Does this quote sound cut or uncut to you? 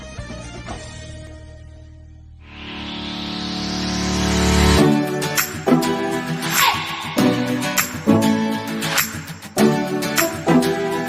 cut